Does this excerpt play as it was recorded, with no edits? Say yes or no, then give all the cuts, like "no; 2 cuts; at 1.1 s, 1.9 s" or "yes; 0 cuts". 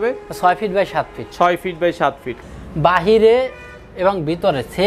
no; 1 cut; at 2.4 s